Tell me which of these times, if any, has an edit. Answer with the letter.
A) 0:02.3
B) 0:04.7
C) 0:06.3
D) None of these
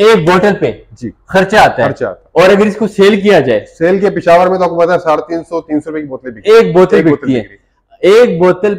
D